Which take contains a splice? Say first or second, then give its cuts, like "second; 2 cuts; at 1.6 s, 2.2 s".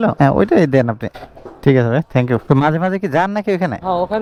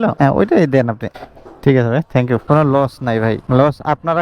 second; 1 cut; at 2.4 s